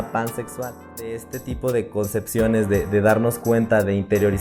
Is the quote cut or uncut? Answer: cut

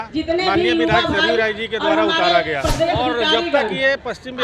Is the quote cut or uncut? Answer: cut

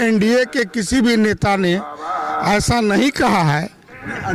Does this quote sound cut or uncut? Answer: uncut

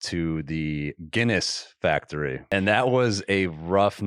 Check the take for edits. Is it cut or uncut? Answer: cut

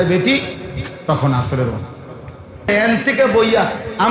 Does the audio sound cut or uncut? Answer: cut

